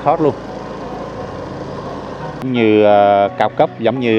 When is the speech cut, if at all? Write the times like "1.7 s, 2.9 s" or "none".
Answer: 2.5 s